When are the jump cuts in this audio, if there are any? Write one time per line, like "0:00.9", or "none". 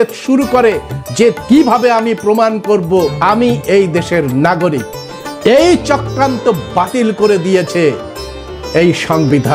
0:01.4
0:03.2